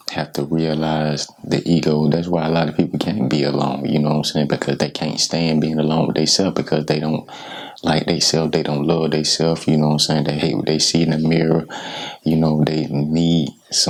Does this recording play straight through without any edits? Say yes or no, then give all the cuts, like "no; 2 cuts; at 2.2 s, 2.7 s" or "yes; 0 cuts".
yes; 0 cuts